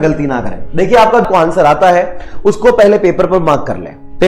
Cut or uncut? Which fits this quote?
cut